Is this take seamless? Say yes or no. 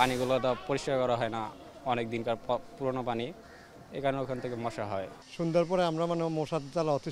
yes